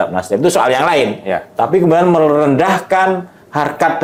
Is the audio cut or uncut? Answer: uncut